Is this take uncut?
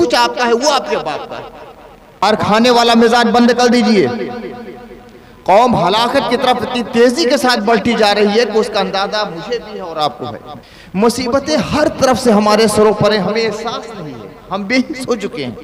no; 2 cuts; at 2.2 s, 10.5 s

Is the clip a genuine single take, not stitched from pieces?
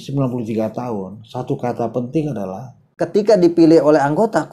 no; 1 cut; at 3.0 s

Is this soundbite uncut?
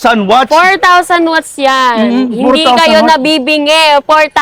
yes; 0 cuts

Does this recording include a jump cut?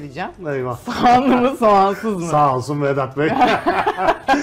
no; 0 cuts

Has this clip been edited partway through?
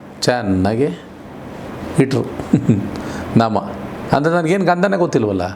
no; 0 cuts

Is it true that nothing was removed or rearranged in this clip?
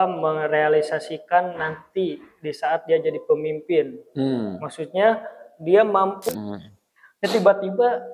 no; 1 cut; at 6.2 s

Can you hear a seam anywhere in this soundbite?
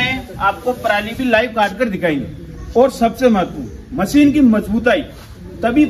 no; 0 cuts

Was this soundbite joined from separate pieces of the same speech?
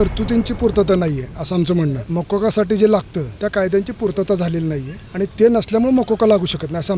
yes; 3 cuts; at 2.0 s, 3.2 s, 5.0 s

